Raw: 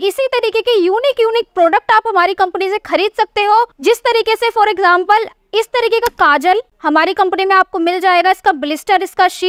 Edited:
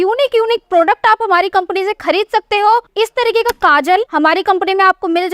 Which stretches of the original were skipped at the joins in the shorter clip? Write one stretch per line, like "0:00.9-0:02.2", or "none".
0:03.7-0:05.5
0:06.7-0:06.8